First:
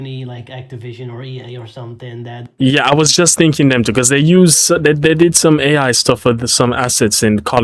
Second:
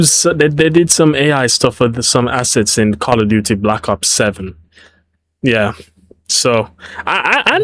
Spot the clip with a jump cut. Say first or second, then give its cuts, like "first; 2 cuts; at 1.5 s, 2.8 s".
first; 1 cut; at 2.5 s